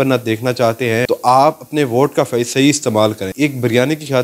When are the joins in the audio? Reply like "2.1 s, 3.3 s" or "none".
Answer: 1.0 s, 3.3 s